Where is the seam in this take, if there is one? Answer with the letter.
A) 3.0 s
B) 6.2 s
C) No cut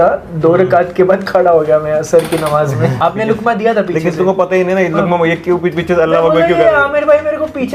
A